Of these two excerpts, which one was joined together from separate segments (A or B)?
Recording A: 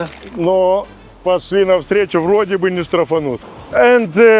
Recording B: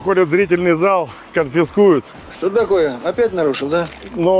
A